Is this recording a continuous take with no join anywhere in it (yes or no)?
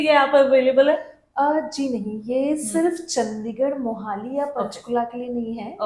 yes